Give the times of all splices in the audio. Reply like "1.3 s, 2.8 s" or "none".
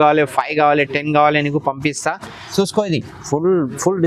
2.4 s